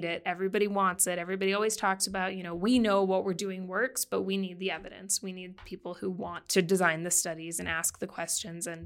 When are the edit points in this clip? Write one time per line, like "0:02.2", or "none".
none